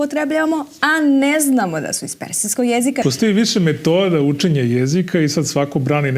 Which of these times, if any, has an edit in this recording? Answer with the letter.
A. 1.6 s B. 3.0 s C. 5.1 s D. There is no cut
B